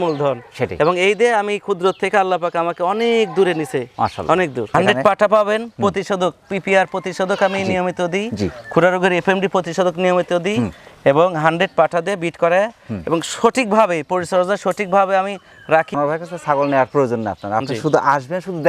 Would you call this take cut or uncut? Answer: cut